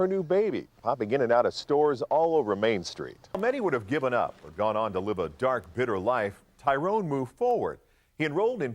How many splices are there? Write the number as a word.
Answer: one